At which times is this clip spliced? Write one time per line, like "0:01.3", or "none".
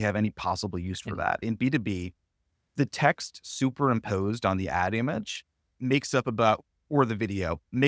0:01.4